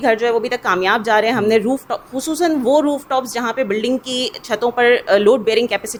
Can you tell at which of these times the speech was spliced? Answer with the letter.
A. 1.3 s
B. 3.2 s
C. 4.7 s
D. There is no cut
D